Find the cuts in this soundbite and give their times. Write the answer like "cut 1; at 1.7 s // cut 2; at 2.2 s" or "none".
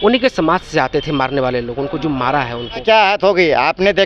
cut 1; at 2.8 s